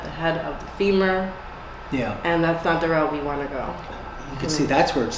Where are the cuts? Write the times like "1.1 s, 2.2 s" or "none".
4.0 s